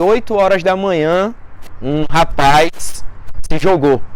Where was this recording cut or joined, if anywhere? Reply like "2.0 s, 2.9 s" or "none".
none